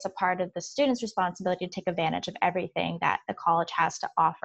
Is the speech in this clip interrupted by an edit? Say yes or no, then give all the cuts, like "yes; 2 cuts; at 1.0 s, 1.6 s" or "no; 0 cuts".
no; 0 cuts